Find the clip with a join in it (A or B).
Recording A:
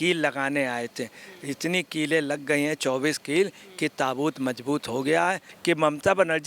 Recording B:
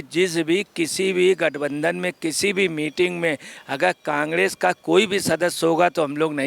A